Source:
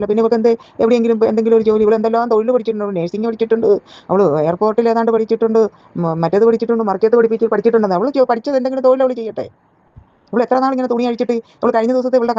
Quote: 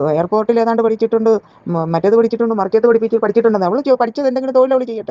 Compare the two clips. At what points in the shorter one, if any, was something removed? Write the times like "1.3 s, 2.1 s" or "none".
none